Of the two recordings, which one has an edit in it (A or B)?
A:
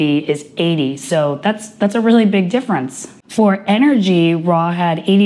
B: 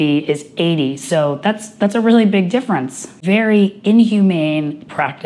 B